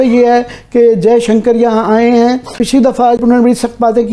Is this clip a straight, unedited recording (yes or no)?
yes